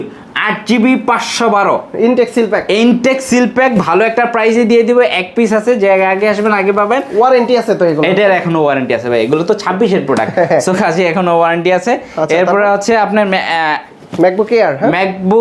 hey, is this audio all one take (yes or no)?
yes